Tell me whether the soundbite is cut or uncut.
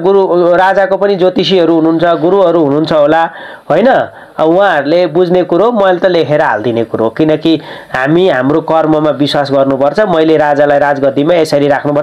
uncut